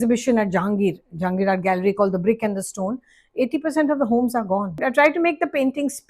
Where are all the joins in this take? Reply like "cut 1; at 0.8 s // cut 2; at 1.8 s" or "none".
cut 1; at 4.8 s